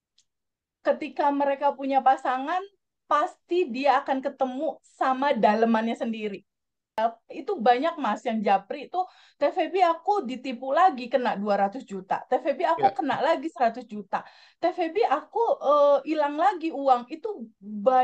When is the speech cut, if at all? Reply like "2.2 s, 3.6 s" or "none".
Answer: 7.0 s